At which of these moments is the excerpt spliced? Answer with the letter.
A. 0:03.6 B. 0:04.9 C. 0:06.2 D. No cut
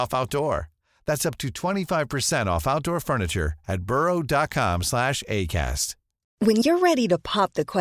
C